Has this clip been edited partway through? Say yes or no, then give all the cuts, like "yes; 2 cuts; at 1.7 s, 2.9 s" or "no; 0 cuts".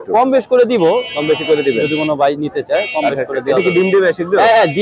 no; 0 cuts